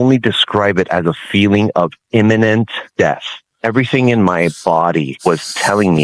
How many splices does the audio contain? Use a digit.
2